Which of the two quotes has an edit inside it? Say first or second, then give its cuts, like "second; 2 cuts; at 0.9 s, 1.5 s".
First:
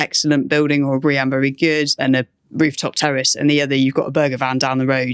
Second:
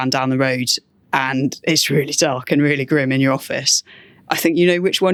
first; 1 cut; at 1.9 s